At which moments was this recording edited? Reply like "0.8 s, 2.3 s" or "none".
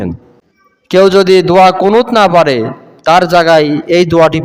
1.0 s